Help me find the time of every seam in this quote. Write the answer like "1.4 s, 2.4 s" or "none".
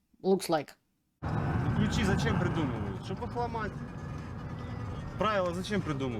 1.2 s